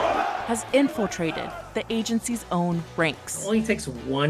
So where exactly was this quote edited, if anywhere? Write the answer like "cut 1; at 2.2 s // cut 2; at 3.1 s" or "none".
none